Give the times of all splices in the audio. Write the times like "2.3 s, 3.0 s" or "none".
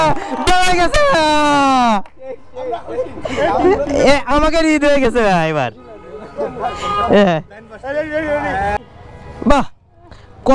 8.8 s